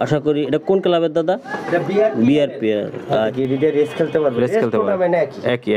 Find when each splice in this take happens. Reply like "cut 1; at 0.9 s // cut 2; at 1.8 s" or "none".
cut 1; at 3.3 s